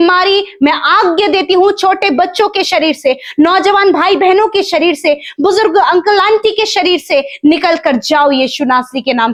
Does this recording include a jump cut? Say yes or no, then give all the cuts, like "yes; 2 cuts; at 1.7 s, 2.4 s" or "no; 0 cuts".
no; 0 cuts